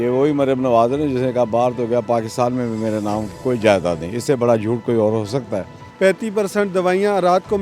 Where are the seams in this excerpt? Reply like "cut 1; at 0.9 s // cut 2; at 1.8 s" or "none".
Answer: cut 1; at 5.9 s